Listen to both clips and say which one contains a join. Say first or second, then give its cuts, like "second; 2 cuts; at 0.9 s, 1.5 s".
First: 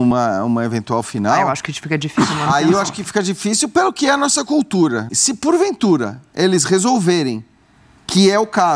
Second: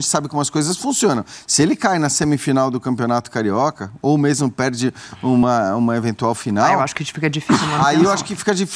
first; 1 cut; at 5.1 s